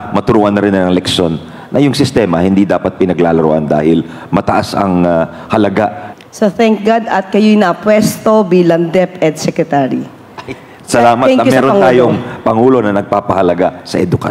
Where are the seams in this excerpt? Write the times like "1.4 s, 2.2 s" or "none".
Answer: 6.0 s